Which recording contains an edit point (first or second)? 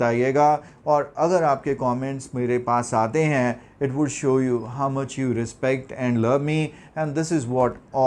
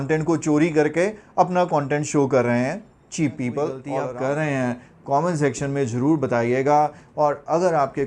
second